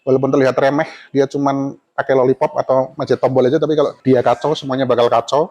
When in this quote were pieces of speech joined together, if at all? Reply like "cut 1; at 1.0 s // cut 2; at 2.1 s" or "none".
cut 1; at 4.0 s